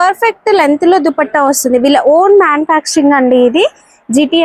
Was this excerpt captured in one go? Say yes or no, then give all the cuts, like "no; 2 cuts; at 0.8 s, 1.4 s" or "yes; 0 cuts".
yes; 0 cuts